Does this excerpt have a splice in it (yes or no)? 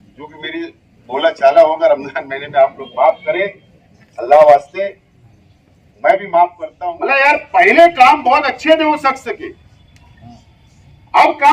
yes